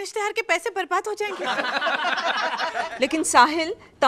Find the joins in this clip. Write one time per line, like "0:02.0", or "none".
0:02.9